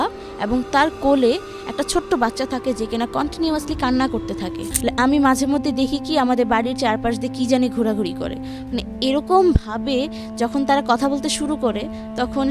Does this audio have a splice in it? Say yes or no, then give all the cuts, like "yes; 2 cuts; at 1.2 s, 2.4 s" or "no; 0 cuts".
yes; 1 cut; at 4.7 s